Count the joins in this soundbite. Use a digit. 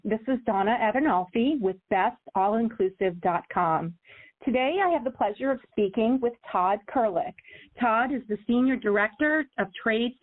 0